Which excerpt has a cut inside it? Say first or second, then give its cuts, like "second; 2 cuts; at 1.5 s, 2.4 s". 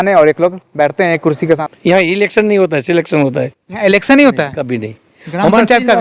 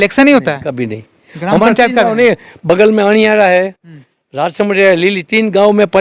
first; 1 cut; at 1.6 s